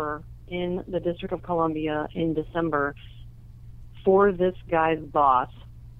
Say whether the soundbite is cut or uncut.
uncut